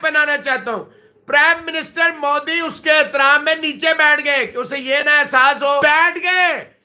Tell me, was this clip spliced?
yes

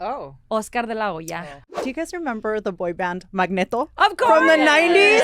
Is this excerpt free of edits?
no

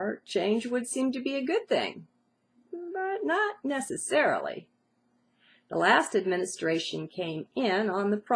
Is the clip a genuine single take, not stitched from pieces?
yes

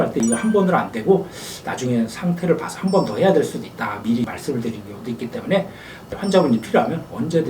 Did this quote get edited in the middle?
yes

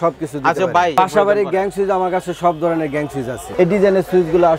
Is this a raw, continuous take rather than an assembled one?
no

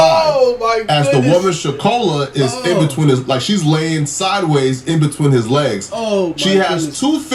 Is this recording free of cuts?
yes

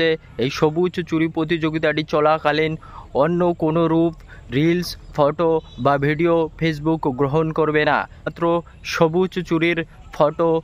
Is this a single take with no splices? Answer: no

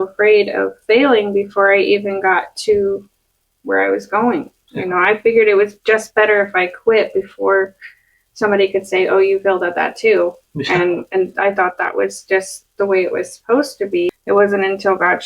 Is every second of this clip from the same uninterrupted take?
no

